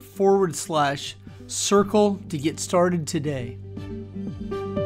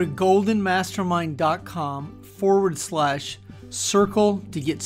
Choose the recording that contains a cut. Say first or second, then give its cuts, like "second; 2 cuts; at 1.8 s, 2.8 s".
first; 1 cut; at 3.5 s